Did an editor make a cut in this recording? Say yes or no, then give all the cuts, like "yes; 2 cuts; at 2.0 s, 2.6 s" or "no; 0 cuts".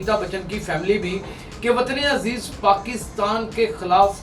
no; 0 cuts